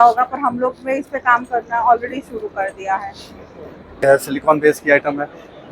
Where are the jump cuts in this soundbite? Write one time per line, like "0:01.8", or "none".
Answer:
0:04.2